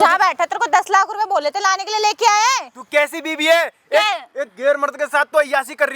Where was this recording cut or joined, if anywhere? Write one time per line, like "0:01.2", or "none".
none